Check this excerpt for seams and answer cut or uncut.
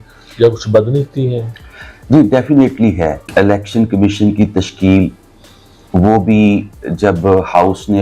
cut